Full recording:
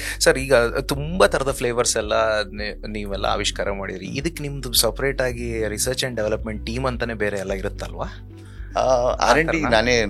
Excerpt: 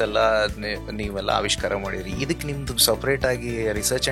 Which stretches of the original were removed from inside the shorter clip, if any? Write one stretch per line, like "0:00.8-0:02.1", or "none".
none